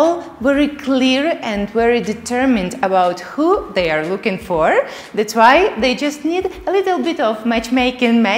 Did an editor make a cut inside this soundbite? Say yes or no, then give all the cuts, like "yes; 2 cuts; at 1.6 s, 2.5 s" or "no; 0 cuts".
no; 0 cuts